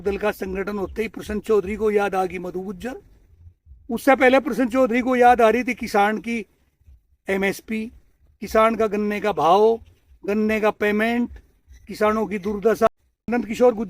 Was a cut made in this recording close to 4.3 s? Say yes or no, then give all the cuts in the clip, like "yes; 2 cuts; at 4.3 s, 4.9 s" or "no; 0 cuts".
no; 1 cut; at 12.9 s